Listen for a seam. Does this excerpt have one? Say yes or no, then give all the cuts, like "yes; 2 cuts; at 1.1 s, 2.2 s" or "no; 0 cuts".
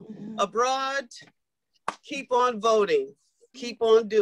no; 0 cuts